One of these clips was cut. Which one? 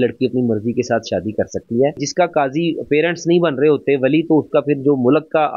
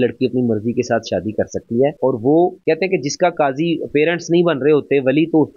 first; 1 cut; at 2.0 s

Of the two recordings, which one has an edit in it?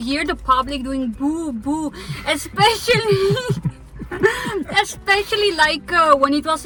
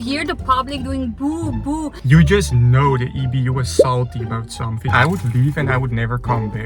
second; 2 cuts; at 2.0 s, 4.8 s

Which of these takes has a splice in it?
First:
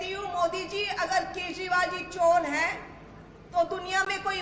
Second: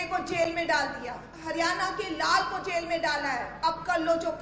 second; 2 cuts; at 1.3 s, 3.5 s

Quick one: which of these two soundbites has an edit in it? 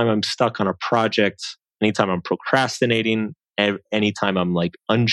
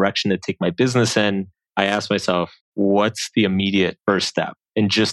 second; 3 cuts; at 1.6 s, 2.6 s, 4.0 s

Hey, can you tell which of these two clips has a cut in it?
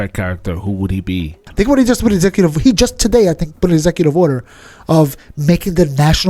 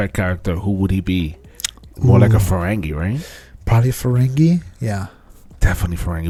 first; 1 cut; at 1.4 s

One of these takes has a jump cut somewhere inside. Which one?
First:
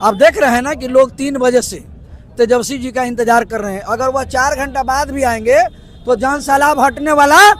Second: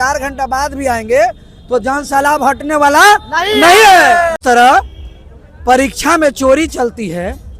second; 1 cut; at 4.4 s

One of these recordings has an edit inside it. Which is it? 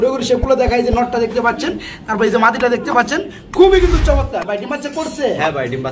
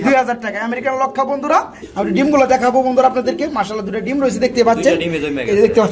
second; 1 cut; at 1.8 s

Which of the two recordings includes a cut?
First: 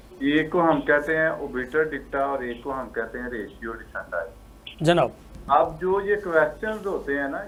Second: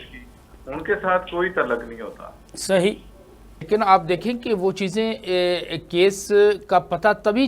second; 1 cut; at 3.6 s

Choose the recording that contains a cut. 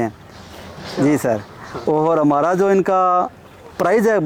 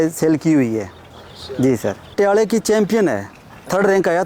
second; 1 cut; at 2.1 s

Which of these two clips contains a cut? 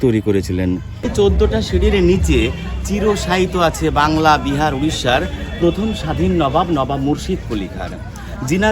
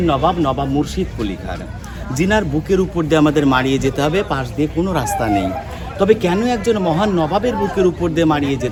first; 1 cut; at 1.1 s

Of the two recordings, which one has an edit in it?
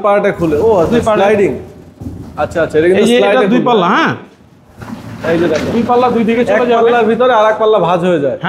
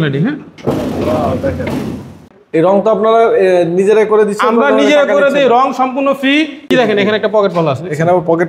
second; 2 cuts; at 2.2 s, 6.7 s

